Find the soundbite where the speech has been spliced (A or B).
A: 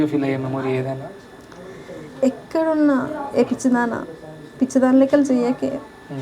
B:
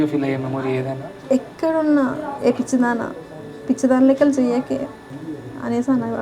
B